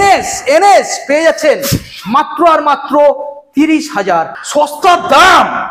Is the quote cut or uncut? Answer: cut